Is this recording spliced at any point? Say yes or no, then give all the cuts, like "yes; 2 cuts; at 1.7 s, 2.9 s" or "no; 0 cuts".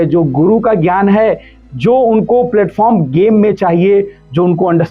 no; 0 cuts